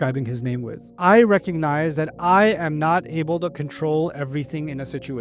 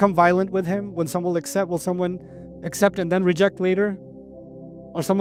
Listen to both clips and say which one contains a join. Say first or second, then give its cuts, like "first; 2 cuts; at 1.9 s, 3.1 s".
first; 1 cut; at 0.9 s